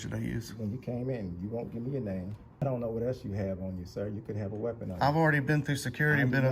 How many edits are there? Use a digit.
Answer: 1